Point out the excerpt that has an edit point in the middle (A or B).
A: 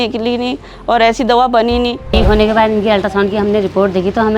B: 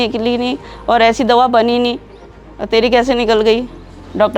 A